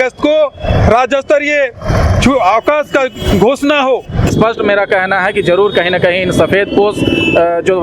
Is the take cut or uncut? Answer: cut